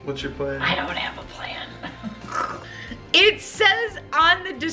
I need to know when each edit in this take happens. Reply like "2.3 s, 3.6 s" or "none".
2.5 s